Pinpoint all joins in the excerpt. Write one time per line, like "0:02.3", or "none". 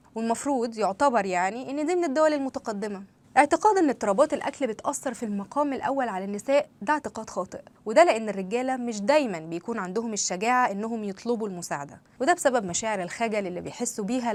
none